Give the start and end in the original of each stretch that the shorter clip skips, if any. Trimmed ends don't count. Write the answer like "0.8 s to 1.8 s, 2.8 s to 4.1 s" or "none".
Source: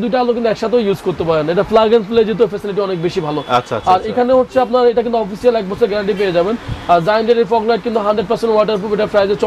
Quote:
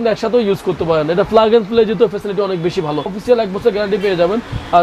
3.5 s to 5.2 s